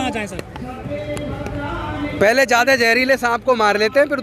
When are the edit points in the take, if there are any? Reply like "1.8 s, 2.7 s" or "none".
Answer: none